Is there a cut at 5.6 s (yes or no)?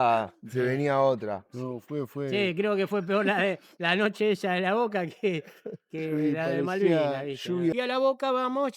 no